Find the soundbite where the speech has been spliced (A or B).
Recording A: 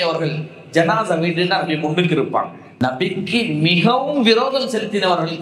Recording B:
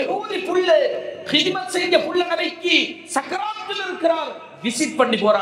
A